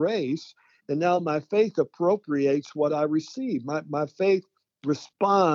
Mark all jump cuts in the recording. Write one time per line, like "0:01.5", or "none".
none